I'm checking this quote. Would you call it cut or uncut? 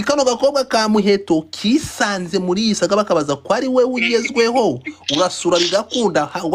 uncut